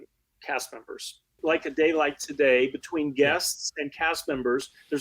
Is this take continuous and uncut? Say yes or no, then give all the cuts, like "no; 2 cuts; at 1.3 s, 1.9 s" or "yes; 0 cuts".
no; 1 cut; at 1.4 s